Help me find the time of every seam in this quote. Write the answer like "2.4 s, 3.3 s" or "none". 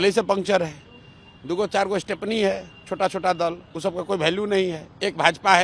none